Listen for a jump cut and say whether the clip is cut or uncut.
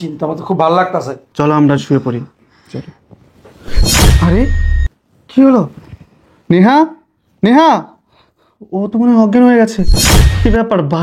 cut